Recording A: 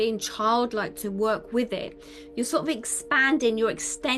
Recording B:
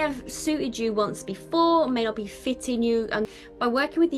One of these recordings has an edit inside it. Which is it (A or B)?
B